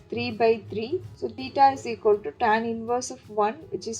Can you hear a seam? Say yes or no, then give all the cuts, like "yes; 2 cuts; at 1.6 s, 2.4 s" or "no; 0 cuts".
yes; 1 cut; at 1.2 s